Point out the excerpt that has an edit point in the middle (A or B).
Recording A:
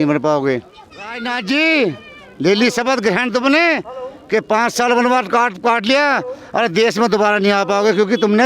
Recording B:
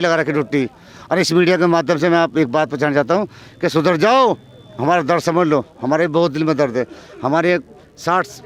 A